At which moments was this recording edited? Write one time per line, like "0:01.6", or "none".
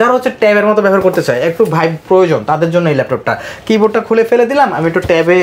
none